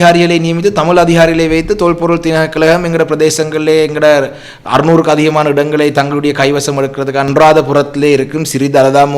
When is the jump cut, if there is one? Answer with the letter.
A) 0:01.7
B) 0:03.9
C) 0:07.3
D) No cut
C